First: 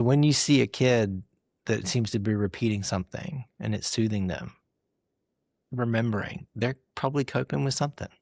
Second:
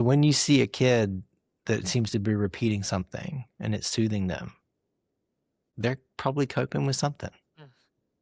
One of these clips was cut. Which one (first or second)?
second